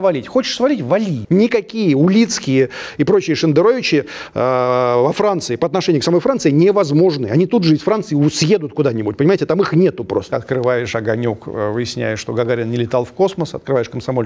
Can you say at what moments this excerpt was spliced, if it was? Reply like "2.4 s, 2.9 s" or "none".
1.2 s, 10.3 s